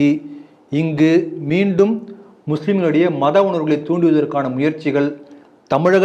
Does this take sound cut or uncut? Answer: uncut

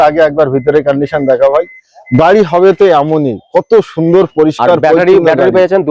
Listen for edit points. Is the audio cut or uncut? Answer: uncut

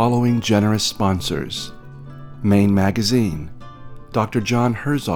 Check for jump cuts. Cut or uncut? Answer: uncut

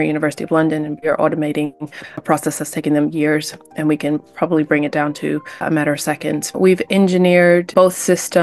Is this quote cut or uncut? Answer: cut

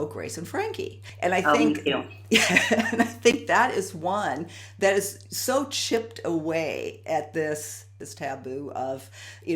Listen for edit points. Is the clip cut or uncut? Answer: cut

